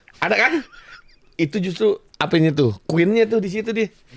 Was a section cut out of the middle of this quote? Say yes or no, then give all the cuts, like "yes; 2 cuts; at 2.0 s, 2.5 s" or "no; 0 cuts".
yes; 1 cut; at 1.3 s